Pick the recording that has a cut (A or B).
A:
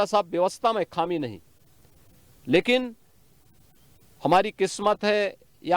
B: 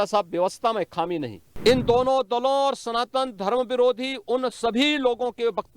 B